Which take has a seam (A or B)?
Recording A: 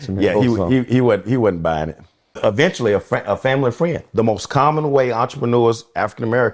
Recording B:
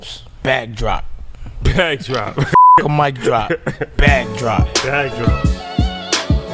A